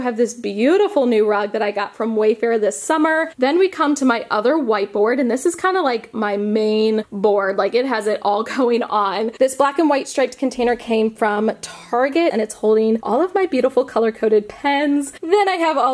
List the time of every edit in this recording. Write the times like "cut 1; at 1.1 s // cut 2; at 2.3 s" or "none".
cut 1; at 3.3 s // cut 2; at 9.3 s // cut 3; at 12.3 s // cut 4; at 15.1 s